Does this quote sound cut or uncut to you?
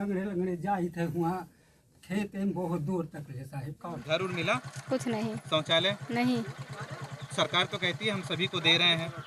cut